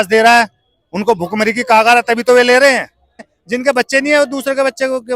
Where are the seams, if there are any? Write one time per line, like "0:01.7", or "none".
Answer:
0:03.3